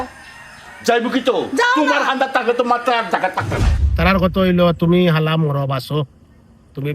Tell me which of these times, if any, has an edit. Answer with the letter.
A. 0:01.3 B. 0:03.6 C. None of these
B